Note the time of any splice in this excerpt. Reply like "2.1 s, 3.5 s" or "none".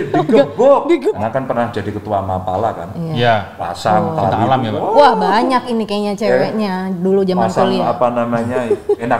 1.1 s